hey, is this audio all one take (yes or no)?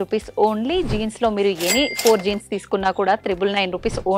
yes